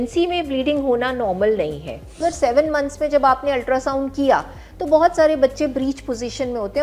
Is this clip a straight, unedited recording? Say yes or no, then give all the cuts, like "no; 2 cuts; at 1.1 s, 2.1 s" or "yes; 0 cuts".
no; 1 cut; at 2.2 s